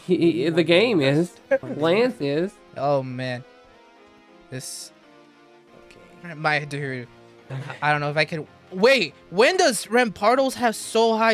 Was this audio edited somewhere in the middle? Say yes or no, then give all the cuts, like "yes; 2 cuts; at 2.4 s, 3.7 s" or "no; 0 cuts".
yes; 2 cuts; at 1.7 s, 2.6 s